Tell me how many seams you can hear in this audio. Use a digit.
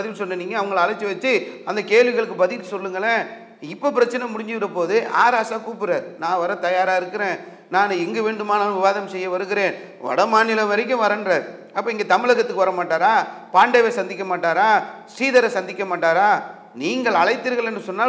0